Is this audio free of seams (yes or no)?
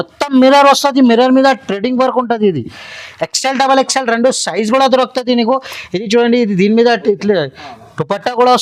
yes